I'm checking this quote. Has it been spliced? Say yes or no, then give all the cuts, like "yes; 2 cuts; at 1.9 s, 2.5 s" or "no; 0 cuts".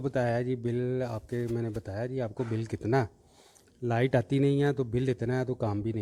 no; 0 cuts